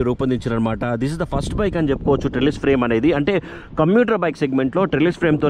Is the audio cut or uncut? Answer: uncut